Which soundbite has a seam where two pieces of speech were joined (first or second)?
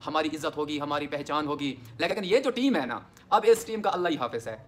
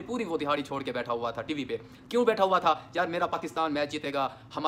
first